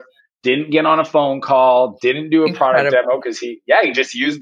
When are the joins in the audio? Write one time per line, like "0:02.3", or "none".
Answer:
none